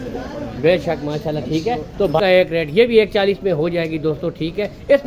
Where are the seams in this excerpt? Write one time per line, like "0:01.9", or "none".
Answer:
0:02.2